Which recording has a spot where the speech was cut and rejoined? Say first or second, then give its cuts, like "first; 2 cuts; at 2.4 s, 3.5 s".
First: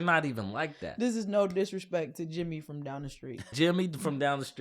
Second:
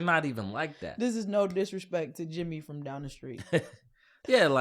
first; 1 cut; at 3.5 s